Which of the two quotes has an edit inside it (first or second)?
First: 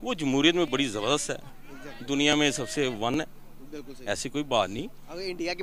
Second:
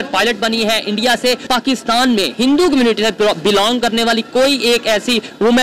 second